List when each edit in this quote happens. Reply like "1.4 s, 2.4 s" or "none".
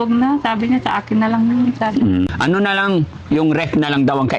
2.3 s